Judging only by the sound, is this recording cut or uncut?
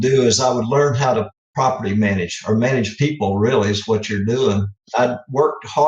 cut